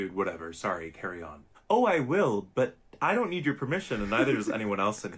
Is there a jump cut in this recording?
yes; 1 cut; at 4.1 s

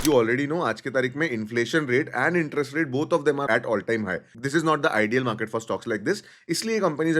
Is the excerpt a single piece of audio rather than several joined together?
no; 1 cut; at 3.4 s

